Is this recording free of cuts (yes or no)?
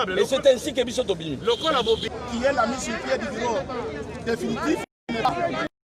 no